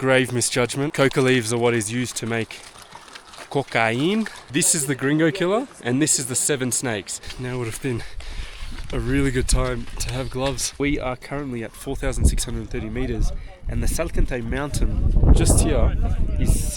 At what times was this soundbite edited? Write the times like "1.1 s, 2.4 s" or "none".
0.9 s, 4.4 s, 7.4 s, 10.8 s